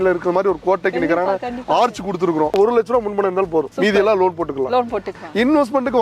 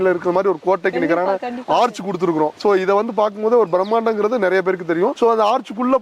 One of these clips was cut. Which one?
first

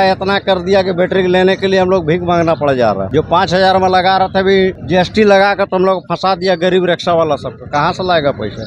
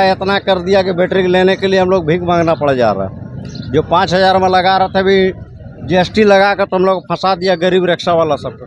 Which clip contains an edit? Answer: first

